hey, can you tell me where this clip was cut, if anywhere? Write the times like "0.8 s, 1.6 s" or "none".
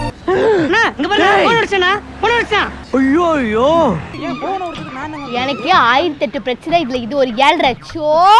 4.1 s